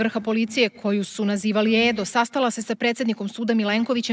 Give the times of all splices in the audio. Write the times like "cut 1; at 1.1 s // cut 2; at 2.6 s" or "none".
none